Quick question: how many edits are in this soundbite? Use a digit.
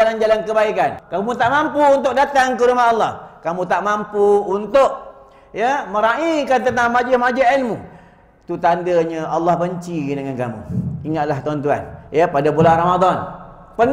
1